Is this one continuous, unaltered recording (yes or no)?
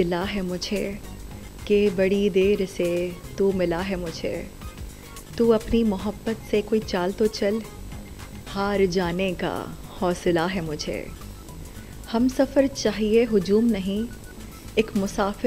yes